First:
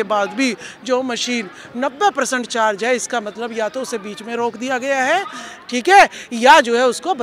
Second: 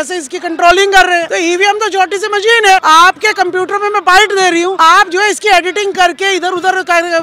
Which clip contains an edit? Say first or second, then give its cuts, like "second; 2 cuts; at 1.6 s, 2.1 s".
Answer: second; 3 cuts; at 1.3 s, 2.8 s, 4.8 s